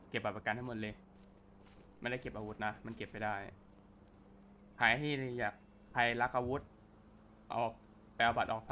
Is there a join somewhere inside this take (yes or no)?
no